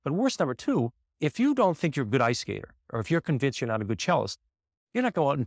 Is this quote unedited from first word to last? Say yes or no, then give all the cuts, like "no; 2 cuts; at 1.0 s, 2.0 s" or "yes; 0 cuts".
no; 1 cut; at 1.0 s